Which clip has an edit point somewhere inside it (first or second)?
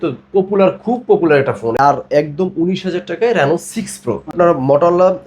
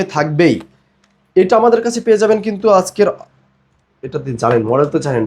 first